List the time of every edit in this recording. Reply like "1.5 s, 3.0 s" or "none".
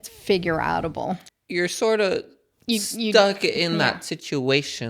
1.3 s